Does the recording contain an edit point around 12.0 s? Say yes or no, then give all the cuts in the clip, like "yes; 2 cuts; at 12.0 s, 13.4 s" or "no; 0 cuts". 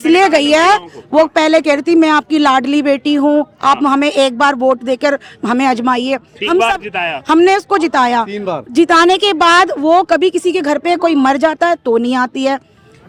no; 0 cuts